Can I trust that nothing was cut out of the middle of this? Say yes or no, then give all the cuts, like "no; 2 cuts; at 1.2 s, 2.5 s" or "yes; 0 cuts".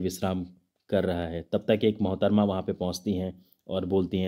yes; 0 cuts